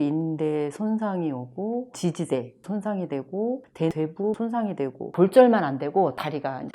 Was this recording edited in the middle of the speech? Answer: yes; 1 cut; at 5.1 s

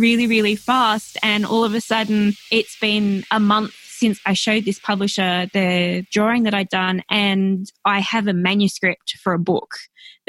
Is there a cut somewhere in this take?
yes; 3 cuts; at 2.4 s, 4.2 s, 6.1 s

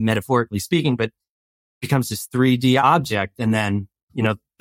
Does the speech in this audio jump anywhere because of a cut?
yes; 1 cut; at 2.8 s

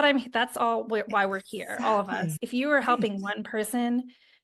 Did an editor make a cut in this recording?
no; 0 cuts

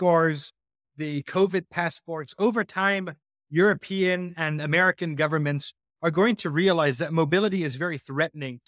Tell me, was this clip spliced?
no; 0 cuts

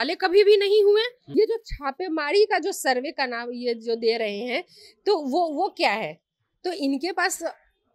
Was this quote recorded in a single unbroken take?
no; 1 cut; at 1.2 s

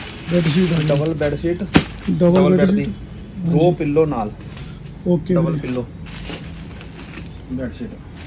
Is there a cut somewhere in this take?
no; 0 cuts

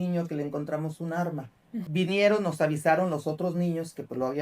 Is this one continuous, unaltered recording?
no; 1 cut; at 1.8 s

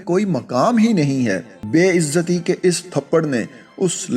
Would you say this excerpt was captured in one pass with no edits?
no; 1 cut; at 1.5 s

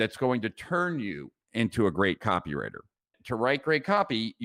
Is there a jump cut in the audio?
no; 0 cuts

